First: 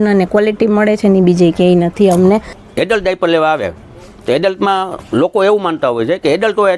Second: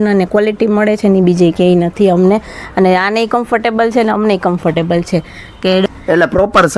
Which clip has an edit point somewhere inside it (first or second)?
first